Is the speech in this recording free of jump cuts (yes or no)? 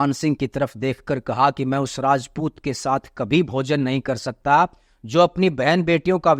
yes